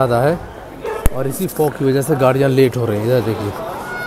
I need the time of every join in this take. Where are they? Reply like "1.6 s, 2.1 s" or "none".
none